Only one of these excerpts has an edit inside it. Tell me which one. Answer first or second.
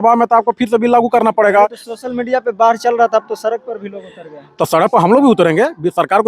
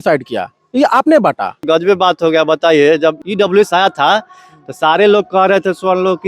second